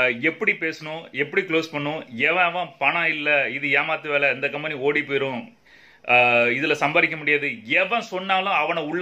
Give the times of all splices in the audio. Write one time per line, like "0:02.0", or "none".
none